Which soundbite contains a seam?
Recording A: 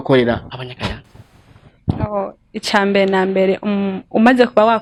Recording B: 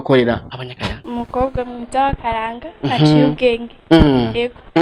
B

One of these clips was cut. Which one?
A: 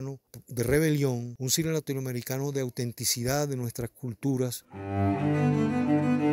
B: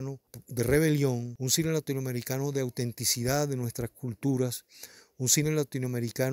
A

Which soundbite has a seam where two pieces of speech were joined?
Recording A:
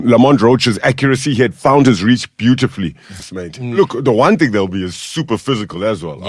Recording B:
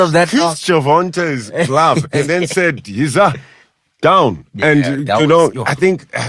A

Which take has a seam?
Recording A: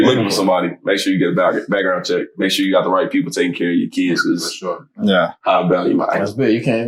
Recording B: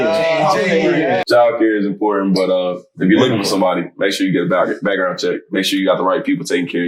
B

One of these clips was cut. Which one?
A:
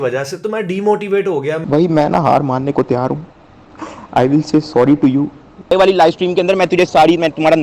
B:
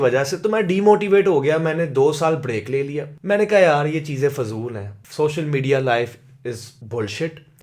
A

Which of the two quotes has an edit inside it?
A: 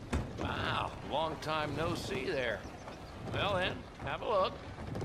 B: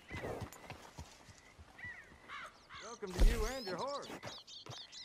B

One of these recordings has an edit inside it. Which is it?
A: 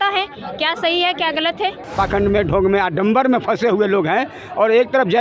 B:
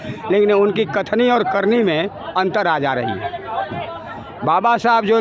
A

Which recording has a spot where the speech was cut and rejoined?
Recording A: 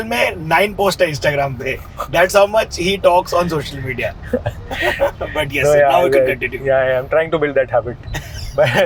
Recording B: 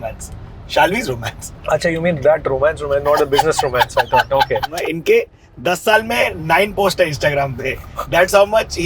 B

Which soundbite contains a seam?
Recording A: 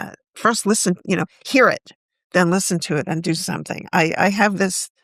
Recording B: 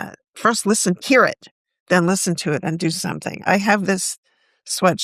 B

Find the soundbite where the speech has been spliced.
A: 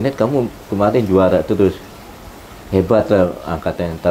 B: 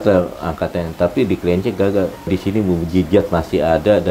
B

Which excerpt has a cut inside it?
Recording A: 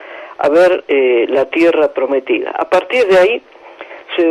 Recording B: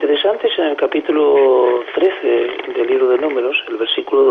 A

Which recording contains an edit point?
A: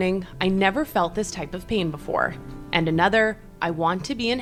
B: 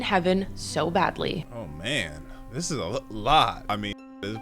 B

